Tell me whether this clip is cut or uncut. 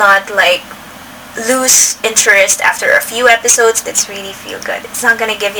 cut